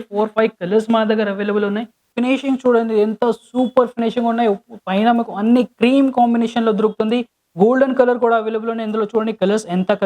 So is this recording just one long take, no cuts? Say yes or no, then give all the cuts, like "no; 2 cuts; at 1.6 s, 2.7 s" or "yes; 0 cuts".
no; 1 cut; at 2.0 s